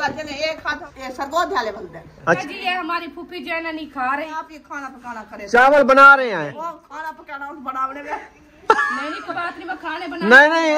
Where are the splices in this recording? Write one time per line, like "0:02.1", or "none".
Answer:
0:00.9
0:02.4
0:04.3
0:06.5
0:09.3